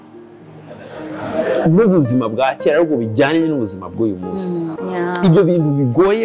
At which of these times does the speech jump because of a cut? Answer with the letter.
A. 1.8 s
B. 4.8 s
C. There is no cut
B